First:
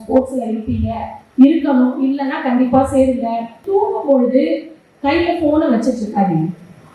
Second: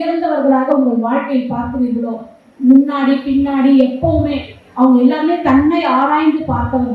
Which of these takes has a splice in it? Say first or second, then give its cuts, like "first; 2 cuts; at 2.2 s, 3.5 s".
first; 1 cut; at 3.6 s